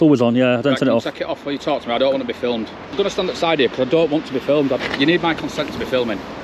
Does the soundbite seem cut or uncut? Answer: cut